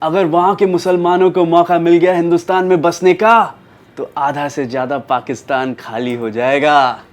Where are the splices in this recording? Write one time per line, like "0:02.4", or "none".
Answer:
none